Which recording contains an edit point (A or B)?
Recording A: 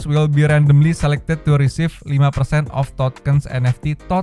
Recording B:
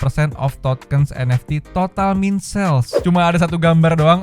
B